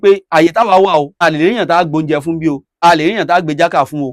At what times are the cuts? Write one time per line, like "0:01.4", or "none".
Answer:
0:01.2
0:02.7